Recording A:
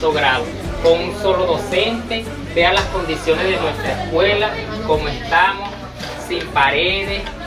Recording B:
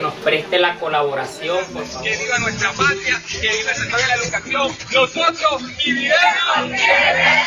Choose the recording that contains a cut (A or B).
B